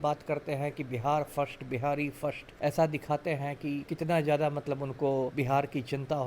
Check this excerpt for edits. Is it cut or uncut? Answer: cut